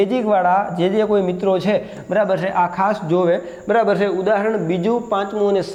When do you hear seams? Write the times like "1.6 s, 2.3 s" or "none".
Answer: none

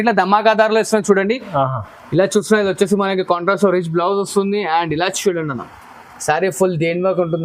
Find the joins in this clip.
none

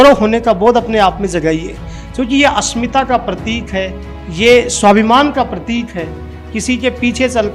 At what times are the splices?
none

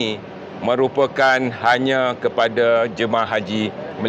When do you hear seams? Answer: none

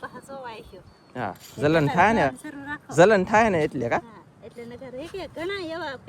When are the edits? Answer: none

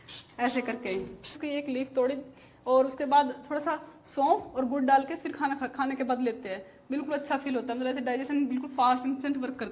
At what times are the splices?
1.3 s

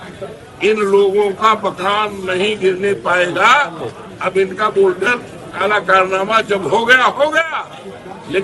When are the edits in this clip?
4.0 s

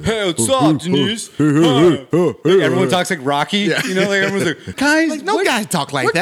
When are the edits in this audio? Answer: 4.7 s

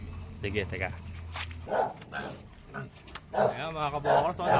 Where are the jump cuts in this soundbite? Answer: 1.5 s

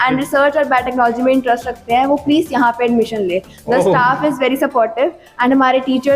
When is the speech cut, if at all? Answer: none

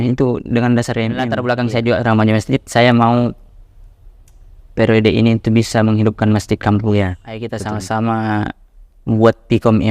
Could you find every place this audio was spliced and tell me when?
1.3 s, 7.5 s

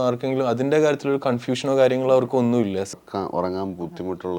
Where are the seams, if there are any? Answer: 3.0 s

